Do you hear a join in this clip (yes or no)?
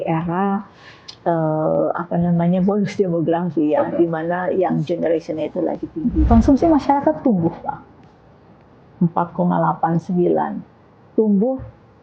yes